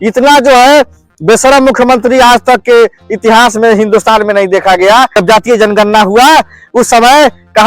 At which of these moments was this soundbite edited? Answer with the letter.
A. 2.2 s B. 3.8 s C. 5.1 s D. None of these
C